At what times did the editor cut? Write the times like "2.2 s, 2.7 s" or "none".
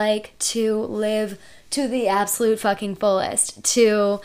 none